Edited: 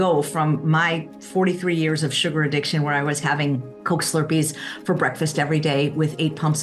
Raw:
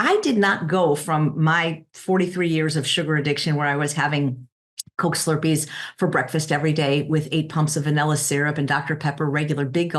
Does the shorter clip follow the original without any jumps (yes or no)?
no